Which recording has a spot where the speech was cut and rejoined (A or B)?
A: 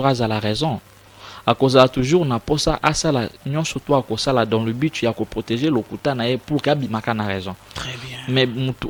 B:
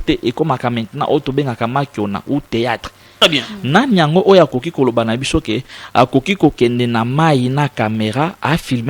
B